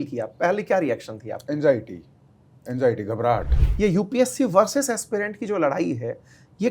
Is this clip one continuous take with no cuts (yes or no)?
no